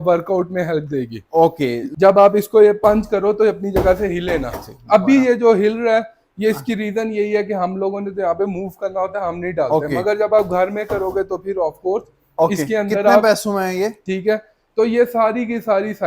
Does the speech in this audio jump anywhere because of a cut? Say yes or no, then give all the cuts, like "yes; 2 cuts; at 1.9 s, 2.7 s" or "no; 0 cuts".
yes; 2 cuts; at 1.9 s, 14.1 s